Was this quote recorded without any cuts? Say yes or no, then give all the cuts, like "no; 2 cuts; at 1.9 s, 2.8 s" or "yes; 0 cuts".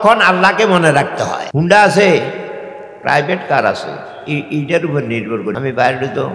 no; 2 cuts; at 1.4 s, 5.5 s